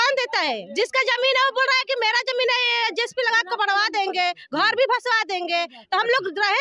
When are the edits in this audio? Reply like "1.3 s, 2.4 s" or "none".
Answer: none